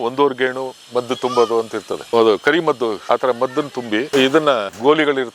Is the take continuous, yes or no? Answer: no